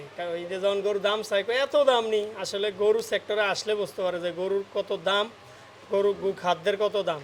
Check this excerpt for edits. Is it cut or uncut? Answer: uncut